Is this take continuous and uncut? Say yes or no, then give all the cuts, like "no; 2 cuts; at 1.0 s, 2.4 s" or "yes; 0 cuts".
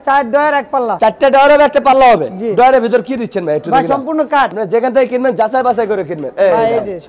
yes; 0 cuts